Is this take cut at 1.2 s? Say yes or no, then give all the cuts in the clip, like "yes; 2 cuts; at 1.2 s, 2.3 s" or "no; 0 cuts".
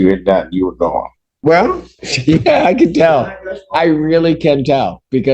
yes; 1 cut; at 1.2 s